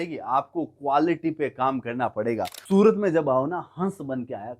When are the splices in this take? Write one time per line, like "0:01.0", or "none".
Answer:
0:02.5